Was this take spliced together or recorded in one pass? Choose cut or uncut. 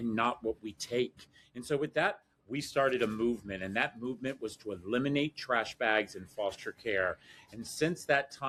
uncut